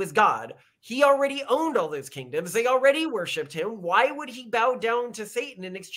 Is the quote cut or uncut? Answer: uncut